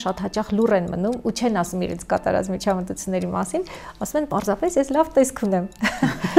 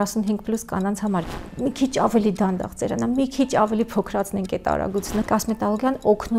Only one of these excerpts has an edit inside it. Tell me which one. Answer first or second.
second